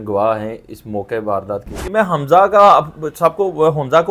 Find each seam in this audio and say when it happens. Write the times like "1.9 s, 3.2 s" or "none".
1.8 s